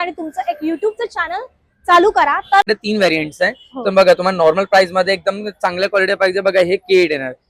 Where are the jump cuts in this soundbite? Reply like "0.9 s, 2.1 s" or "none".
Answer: 2.7 s